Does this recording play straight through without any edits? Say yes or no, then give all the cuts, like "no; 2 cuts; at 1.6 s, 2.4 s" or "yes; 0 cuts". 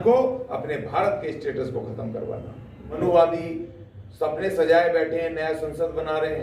no; 1 cut; at 3.0 s